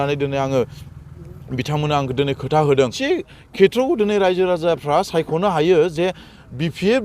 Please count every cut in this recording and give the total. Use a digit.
1